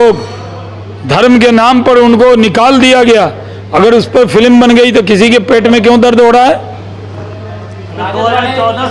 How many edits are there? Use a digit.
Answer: 0